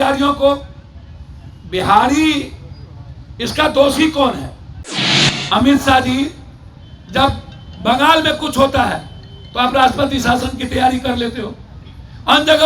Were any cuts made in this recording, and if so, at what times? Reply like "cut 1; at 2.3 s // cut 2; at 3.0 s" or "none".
cut 1; at 5.1 s